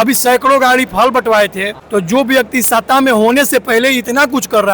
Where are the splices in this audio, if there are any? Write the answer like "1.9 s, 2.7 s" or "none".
1.7 s